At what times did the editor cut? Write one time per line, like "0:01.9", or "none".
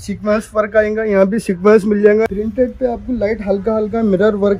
0:02.3